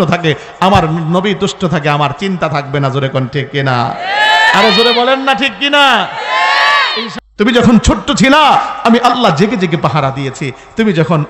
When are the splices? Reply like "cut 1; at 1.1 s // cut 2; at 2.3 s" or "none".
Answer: cut 1; at 7.1 s

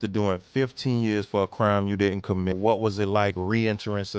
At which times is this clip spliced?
cut 1; at 2.5 s

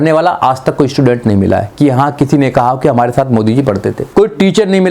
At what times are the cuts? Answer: cut 1; at 4.0 s

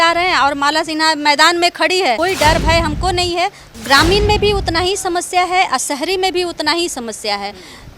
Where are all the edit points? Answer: cut 1; at 2.2 s // cut 2; at 3.7 s

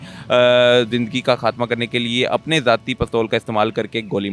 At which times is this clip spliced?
none

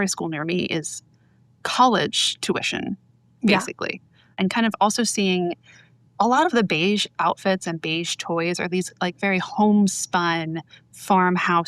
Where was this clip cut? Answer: cut 1; at 4.4 s

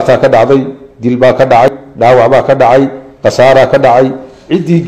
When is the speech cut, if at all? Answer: cut 1; at 1.7 s

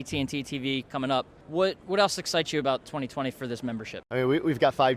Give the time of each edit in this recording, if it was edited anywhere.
cut 1; at 1.4 s // cut 2; at 3.9 s

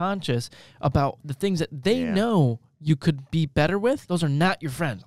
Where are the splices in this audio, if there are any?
cut 1; at 4.0 s

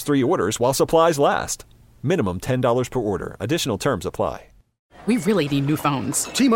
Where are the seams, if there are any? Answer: cut 1; at 4.9 s

